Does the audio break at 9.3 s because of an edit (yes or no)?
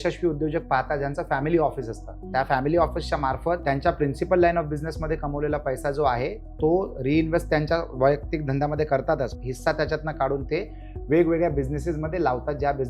yes